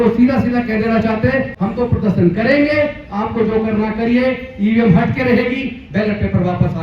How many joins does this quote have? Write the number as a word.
one